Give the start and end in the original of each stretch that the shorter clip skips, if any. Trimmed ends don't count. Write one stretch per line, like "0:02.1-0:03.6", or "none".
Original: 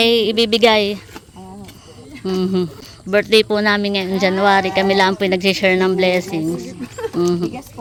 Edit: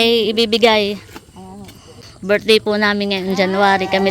0:02.0-0:02.9

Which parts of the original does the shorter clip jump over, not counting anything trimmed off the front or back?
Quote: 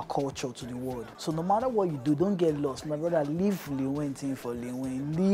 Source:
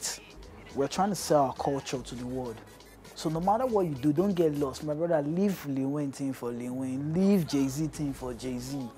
0:02.6-0:03.1

